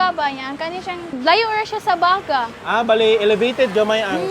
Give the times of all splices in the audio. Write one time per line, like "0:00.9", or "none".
0:00.9